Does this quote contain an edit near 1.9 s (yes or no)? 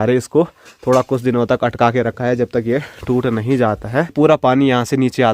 no